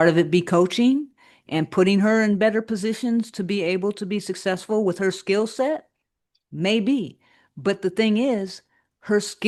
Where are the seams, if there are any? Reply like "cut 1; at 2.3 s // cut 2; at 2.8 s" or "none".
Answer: none